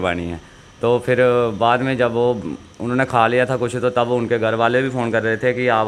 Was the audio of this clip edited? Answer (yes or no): no